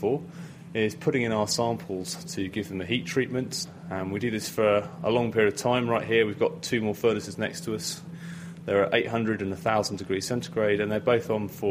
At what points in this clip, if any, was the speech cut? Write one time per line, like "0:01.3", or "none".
0:03.6
0:08.1